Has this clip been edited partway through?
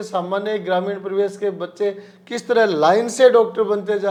no; 0 cuts

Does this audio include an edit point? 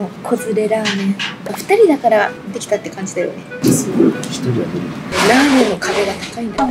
yes; 2 cuts; at 3.5 s, 5.1 s

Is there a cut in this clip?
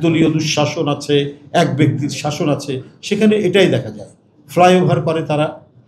no; 0 cuts

